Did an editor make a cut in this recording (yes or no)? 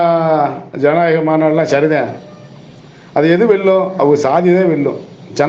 no